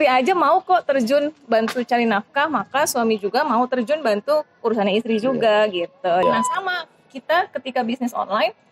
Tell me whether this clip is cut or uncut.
cut